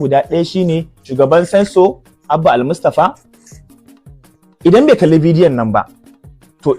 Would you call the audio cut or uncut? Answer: cut